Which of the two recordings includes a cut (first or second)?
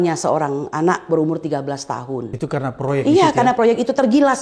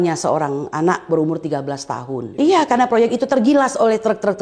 second